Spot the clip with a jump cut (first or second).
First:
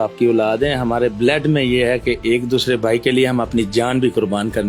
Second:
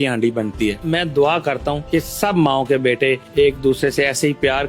second